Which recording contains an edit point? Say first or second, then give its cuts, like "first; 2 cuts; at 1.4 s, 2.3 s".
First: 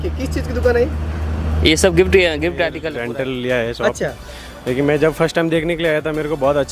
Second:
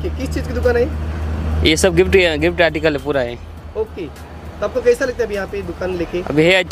first; 1 cut; at 2.8 s